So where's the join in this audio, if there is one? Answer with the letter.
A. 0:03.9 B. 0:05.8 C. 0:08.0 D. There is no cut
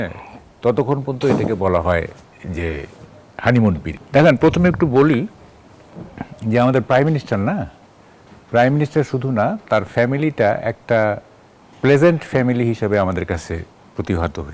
A